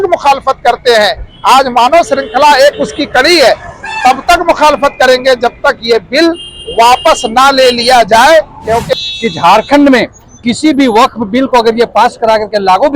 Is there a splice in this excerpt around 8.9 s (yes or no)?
yes